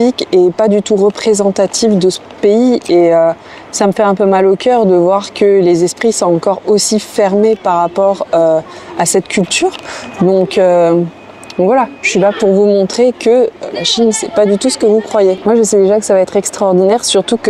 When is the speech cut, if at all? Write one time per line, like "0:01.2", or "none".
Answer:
none